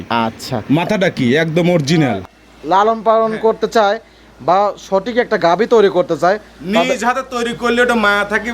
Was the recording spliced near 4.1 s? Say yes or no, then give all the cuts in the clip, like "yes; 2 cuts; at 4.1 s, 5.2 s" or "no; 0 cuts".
no; 1 cut; at 2.3 s